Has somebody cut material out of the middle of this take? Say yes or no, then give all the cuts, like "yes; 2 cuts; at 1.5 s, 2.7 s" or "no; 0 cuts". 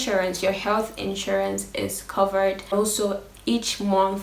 yes; 1 cut; at 2.7 s